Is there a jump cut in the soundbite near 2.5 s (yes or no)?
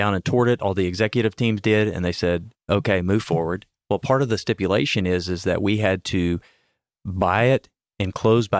yes